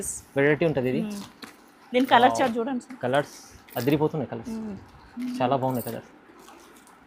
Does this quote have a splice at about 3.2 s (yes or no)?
no